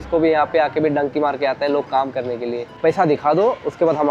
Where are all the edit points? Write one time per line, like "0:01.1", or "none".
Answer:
0:02.7

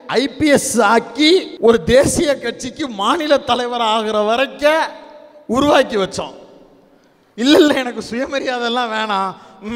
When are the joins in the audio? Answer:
0:01.5

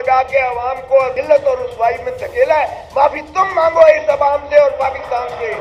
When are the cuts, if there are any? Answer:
0:01.1

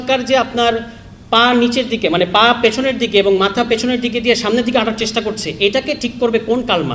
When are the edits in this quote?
none

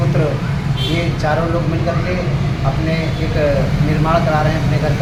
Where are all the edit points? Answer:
none

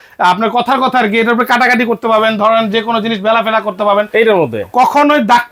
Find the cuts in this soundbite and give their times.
none

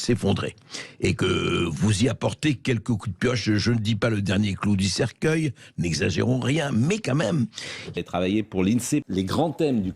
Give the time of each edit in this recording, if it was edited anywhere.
0:07.8
0:09.0

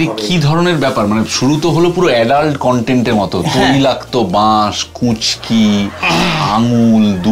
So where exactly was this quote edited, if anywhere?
none

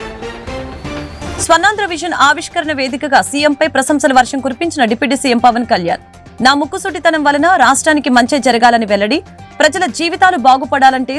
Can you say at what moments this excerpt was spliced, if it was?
0:01.1

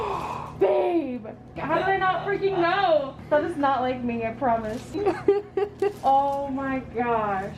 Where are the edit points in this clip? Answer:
0:01.6
0:03.2
0:04.9

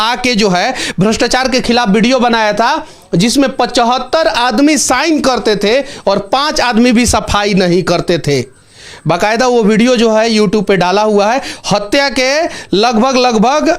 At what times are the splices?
none

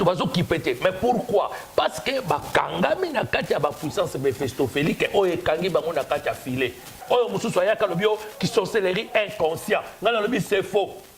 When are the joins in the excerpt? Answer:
0:06.9

